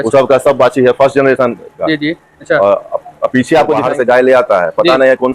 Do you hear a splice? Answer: yes; 1 cut; at 3.8 s

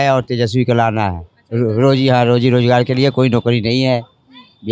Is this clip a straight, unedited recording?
yes; 0 cuts

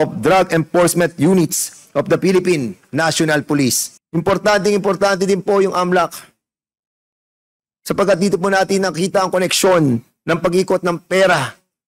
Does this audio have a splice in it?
yes; 1 cut; at 3.9 s

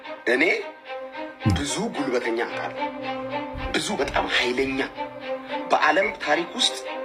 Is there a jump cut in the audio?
no; 0 cuts

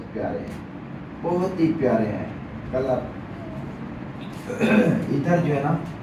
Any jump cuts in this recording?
no; 0 cuts

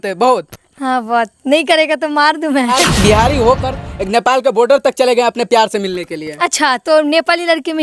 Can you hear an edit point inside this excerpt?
yes; 1 cut; at 2.9 s

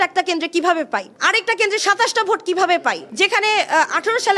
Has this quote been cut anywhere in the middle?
yes; 2 cuts; at 1.1 s, 3.1 s

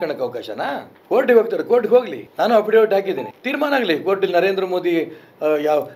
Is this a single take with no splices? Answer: no; 3 cuts; at 0.9 s, 2.2 s, 3.3 s

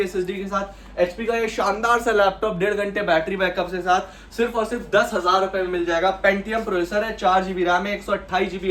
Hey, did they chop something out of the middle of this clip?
no; 0 cuts

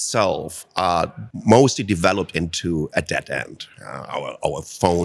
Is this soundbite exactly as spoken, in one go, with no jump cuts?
no; 1 cut; at 1.3 s

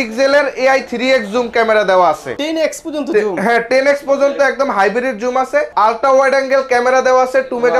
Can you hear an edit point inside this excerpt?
yes; 2 cuts; at 2.3 s, 5.7 s

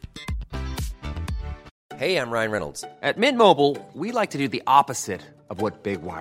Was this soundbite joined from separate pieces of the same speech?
yes; 1 cut; at 1.7 s

